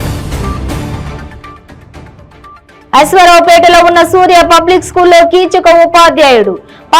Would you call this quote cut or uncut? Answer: cut